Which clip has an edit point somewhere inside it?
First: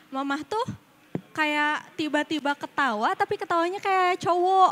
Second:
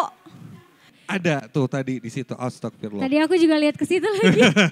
second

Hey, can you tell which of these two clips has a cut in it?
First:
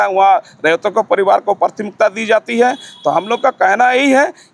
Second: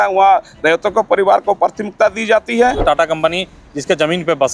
second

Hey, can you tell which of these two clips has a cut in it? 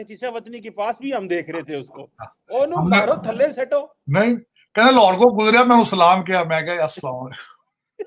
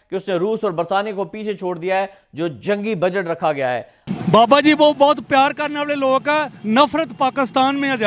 second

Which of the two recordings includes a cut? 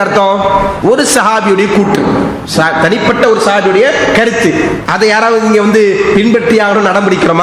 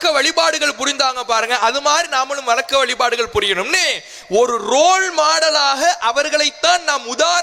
first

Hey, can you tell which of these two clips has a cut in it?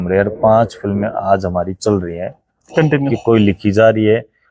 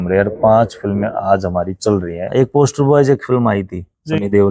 second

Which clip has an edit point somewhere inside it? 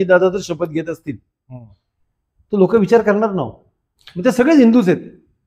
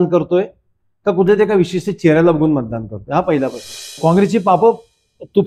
second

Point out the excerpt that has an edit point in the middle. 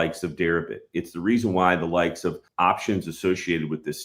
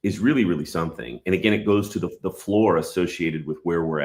first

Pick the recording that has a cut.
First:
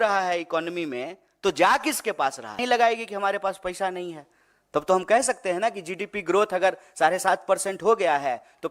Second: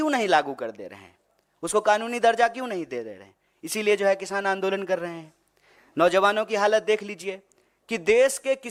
first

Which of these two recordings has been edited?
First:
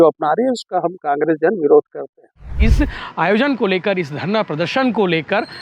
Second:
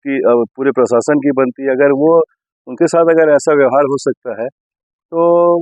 first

